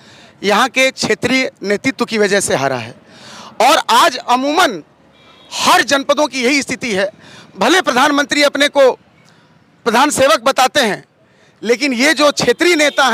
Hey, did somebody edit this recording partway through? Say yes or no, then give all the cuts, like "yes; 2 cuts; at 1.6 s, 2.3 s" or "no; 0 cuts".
no; 0 cuts